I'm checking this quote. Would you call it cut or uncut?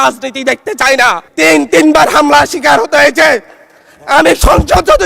cut